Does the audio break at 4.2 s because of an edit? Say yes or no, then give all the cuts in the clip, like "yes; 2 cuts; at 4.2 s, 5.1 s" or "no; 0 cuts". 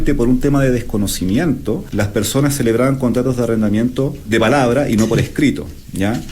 yes; 2 cuts; at 1.9 s, 4.2 s